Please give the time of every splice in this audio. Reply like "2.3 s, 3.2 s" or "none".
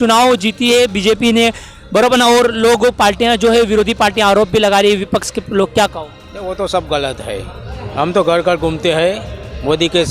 none